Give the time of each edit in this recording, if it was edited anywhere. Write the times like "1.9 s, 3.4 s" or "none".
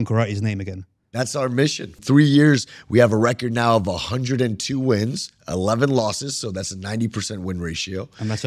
2.0 s